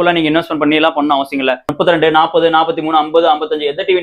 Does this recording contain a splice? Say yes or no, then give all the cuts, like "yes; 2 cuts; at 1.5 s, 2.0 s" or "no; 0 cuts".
yes; 1 cut; at 1.7 s